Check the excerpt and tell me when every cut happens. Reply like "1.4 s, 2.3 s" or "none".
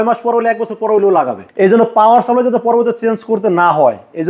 1.4 s